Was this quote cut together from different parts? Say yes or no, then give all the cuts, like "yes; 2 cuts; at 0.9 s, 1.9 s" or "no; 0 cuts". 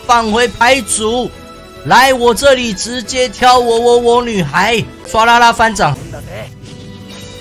yes; 2 cuts; at 5.0 s, 5.9 s